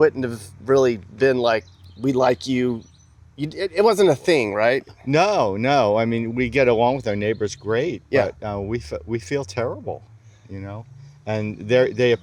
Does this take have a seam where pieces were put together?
no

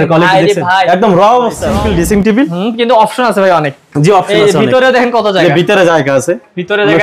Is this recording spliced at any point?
yes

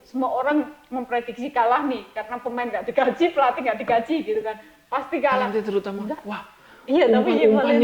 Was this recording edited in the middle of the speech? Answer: yes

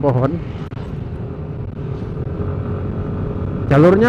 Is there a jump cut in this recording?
yes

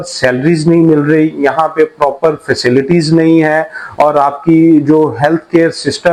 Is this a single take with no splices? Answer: yes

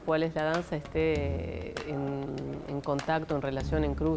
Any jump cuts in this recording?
no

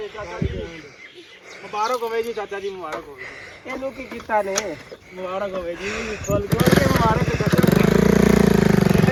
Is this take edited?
no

